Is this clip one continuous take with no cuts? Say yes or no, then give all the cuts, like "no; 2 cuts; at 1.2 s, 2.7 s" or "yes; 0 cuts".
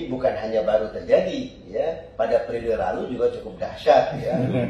yes; 0 cuts